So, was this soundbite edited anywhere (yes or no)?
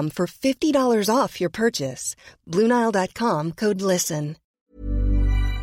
yes